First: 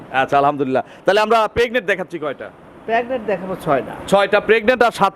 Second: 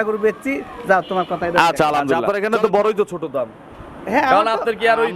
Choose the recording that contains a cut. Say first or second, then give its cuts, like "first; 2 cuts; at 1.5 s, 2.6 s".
second; 1 cut; at 2.2 s